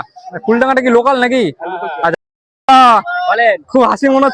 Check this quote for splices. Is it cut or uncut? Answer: cut